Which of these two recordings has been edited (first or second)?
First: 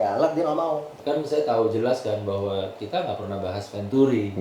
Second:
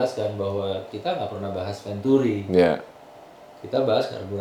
first